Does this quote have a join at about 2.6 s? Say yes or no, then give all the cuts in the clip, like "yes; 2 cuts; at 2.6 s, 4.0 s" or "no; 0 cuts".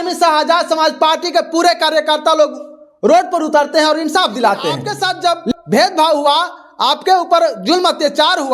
no; 1 cut; at 4.9 s